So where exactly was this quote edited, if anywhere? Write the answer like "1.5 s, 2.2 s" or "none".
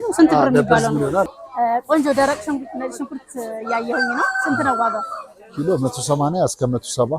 1.3 s